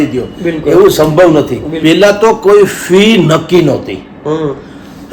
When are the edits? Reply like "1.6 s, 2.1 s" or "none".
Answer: 1.6 s